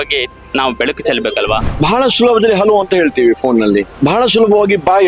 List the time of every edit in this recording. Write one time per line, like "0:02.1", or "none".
0:01.6
0:03.9